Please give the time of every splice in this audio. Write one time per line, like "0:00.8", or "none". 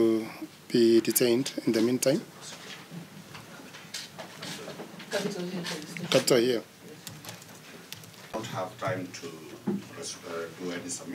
0:08.3